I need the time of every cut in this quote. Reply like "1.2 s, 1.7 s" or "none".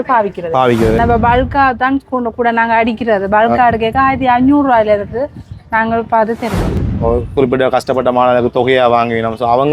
1.0 s, 6.7 s